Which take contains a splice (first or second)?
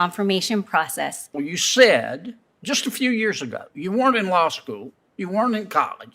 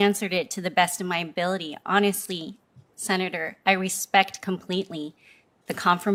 first